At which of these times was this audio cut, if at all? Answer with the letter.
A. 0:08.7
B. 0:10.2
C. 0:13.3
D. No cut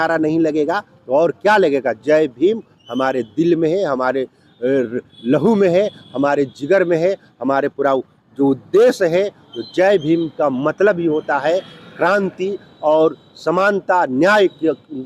D